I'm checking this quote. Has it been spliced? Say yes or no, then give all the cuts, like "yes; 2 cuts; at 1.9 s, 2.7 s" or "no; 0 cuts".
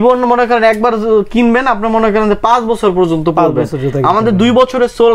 no; 0 cuts